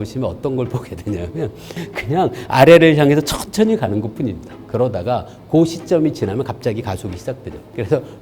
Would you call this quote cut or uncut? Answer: cut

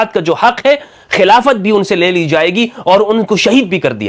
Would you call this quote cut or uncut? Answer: uncut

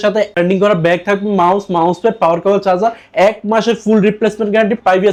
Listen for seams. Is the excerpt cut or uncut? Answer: uncut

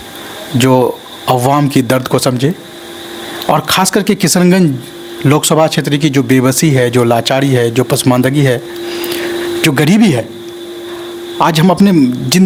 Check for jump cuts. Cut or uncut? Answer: uncut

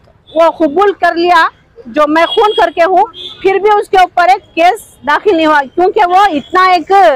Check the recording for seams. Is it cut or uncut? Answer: uncut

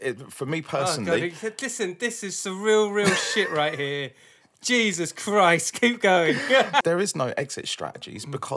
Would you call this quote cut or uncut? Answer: cut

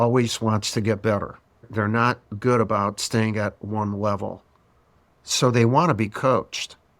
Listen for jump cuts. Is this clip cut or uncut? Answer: cut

